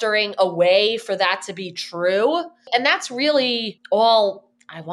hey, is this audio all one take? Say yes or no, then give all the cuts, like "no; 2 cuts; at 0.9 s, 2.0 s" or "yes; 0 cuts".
no; 2 cuts; at 2.7 s, 3.7 s